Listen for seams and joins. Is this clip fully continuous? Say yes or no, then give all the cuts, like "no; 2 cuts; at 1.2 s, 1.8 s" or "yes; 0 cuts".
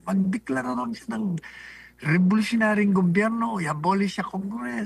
yes; 0 cuts